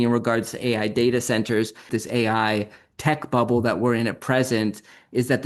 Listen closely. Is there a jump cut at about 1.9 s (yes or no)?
yes